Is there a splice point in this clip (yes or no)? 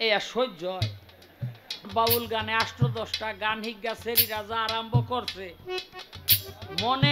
yes